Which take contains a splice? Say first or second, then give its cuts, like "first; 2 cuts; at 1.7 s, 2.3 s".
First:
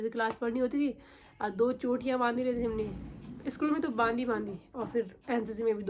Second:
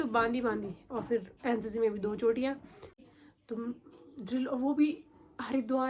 second; 1 cut; at 3.0 s